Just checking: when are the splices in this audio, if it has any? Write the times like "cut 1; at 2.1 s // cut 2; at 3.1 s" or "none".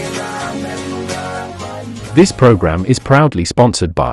cut 1; at 1.9 s

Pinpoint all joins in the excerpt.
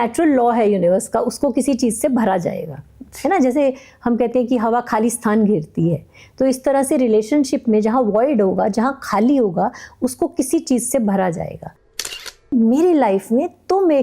cut 1; at 12.0 s

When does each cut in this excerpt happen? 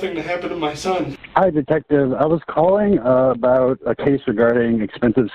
cut 1; at 1.1 s

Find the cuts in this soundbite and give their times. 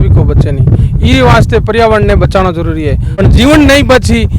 cut 1; at 3.1 s

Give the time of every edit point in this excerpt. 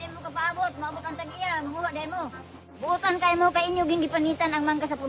cut 1; at 2.5 s

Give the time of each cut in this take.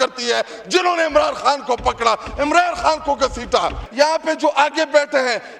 cut 1; at 3.8 s

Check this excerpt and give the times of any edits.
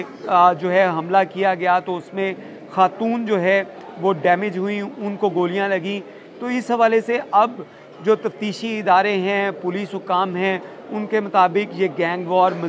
none

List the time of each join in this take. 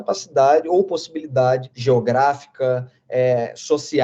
cut 1; at 1.7 s

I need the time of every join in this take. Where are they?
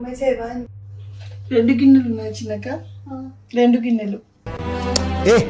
none

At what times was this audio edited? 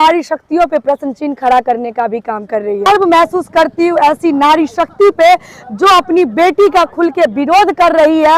cut 1; at 2.9 s

